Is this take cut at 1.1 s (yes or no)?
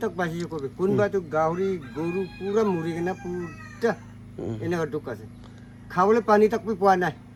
no